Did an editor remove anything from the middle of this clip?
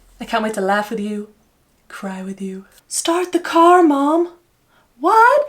yes; 1 cut; at 2.8 s

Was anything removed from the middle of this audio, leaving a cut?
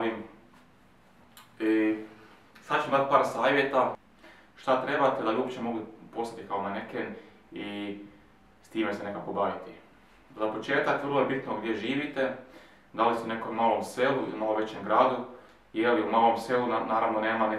yes; 1 cut; at 4.0 s

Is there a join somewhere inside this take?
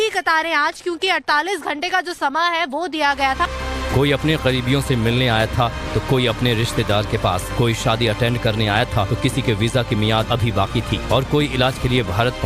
yes; 1 cut; at 8.8 s

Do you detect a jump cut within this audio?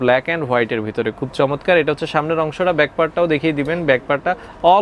no; 0 cuts

